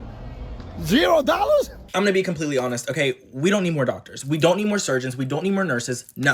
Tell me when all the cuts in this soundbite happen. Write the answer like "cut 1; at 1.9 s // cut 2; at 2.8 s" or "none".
cut 1; at 1.8 s